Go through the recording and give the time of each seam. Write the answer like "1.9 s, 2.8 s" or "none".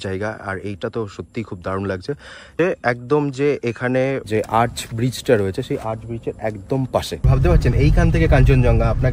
2.5 s, 4.2 s, 7.3 s